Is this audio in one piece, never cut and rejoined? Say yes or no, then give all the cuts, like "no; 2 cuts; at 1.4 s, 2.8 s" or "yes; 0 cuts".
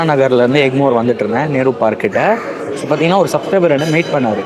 yes; 0 cuts